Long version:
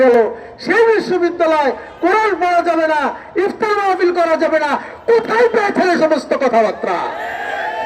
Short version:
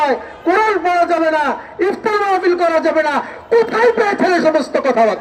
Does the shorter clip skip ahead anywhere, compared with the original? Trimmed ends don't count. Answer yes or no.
no